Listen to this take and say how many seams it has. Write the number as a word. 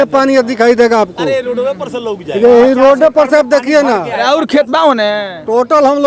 zero